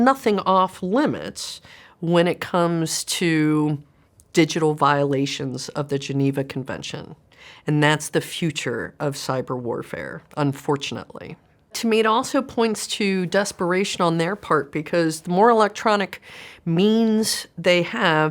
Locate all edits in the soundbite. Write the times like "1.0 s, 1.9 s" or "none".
none